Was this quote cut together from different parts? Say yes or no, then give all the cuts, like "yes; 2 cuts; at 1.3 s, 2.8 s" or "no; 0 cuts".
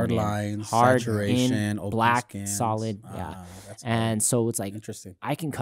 no; 0 cuts